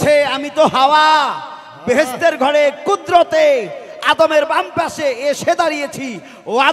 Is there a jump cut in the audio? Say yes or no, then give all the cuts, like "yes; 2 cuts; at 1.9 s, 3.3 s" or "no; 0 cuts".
no; 0 cuts